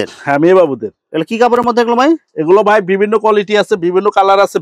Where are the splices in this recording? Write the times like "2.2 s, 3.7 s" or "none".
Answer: none

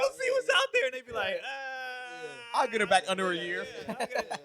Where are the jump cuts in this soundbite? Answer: none

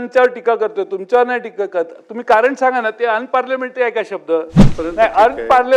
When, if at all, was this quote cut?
4.7 s

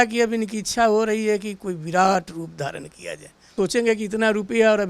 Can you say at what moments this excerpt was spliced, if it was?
3.5 s

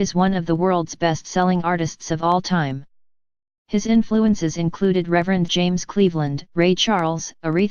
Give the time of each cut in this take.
none

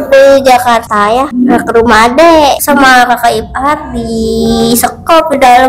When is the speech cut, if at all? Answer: 1.0 s, 2.6 s

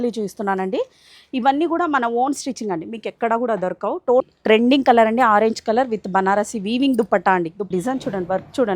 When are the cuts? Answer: 4.2 s, 7.7 s

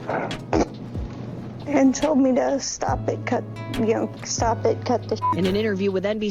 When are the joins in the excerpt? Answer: 5.3 s

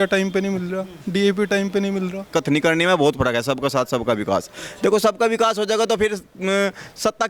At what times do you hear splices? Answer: 2.3 s

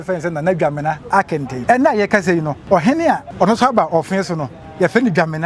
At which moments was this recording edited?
1.5 s, 2.5 s, 3.3 s

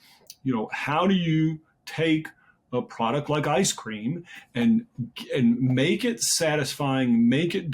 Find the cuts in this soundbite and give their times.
none

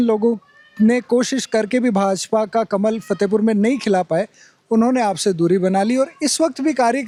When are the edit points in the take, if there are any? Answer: none

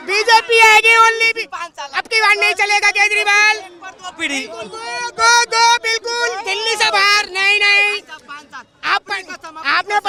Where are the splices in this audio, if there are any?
none

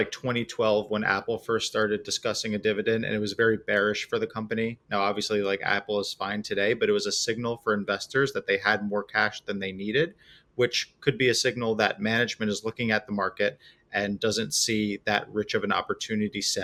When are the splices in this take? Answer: none

